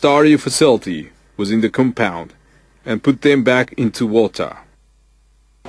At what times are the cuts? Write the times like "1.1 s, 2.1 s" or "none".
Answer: 2.1 s